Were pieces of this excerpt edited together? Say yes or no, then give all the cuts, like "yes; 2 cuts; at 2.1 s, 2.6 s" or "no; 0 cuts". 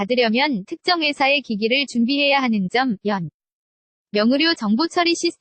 no; 0 cuts